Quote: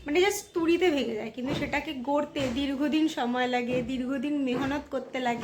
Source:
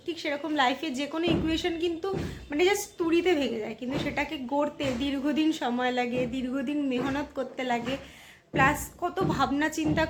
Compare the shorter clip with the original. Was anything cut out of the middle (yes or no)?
no